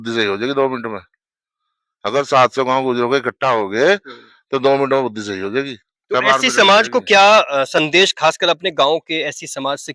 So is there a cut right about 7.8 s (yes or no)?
no